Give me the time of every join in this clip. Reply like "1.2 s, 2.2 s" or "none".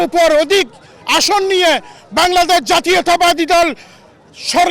none